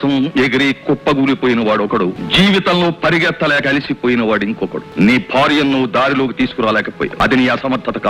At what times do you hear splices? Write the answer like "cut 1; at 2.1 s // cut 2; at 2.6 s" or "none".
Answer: cut 1; at 2.2 s // cut 2; at 4.8 s // cut 3; at 7.1 s